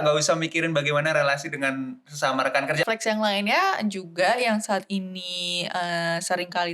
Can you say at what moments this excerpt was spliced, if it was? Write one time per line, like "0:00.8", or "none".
0:02.8